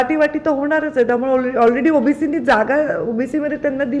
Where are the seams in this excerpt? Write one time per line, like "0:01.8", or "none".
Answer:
none